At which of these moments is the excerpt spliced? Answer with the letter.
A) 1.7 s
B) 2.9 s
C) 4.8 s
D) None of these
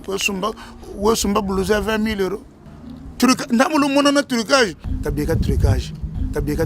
D